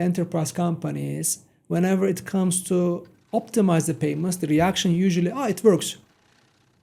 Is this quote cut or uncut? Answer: uncut